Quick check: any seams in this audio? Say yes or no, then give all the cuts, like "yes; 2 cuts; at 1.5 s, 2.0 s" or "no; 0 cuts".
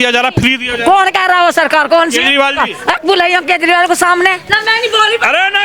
yes; 1 cut; at 4.5 s